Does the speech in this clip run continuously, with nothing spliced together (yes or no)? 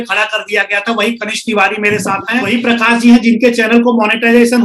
no